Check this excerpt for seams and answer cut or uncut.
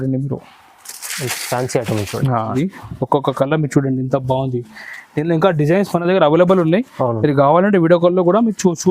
cut